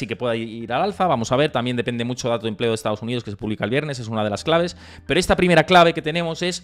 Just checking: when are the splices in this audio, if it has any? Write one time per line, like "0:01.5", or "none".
none

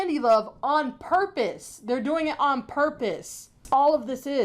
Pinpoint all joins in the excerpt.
0:03.5

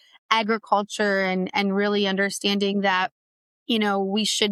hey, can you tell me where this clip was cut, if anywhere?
none

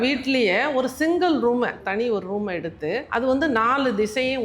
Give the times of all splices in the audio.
0:01.8
0:03.1

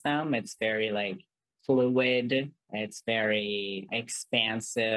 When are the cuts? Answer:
0:02.6
0:03.9

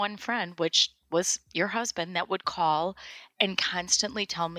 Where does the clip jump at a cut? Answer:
none

